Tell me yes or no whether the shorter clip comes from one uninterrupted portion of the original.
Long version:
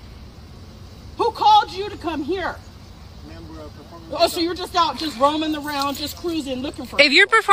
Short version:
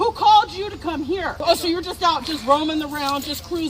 no